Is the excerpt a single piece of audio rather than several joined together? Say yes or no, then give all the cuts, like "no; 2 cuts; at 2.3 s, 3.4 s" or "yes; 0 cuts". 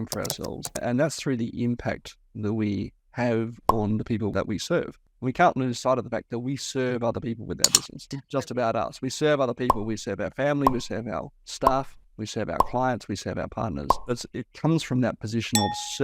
no; 2 cuts; at 4.3 s, 14.0 s